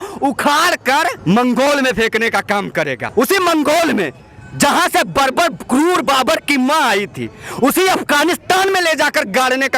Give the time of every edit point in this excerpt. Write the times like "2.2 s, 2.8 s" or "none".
none